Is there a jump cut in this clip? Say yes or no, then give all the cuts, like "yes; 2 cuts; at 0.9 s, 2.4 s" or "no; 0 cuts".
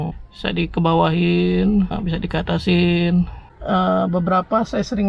yes; 1 cut; at 3.5 s